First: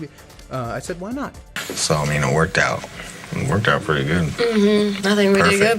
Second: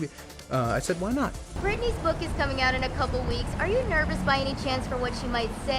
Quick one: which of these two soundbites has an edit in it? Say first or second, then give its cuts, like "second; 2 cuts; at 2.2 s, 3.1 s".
first; 1 cut; at 1.6 s